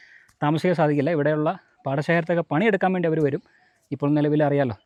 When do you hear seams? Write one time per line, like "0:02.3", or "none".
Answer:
none